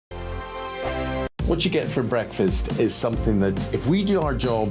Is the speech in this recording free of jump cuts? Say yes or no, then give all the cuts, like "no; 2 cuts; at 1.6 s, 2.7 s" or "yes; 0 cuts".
no; 1 cut; at 1.1 s